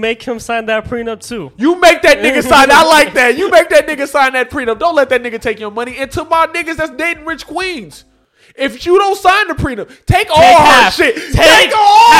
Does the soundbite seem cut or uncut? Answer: uncut